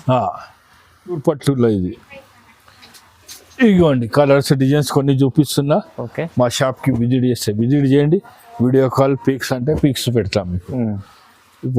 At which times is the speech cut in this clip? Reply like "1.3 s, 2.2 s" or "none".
1.2 s